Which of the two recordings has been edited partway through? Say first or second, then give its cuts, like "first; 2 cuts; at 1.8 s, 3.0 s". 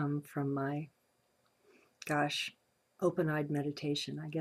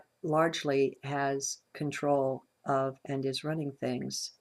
second; 1 cut; at 2.8 s